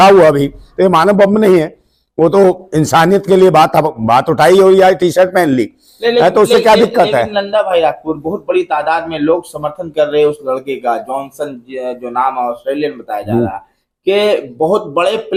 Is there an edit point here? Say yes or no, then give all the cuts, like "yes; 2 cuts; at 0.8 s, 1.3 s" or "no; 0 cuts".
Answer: no; 0 cuts